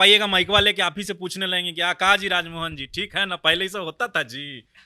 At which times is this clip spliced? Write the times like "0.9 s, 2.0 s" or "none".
none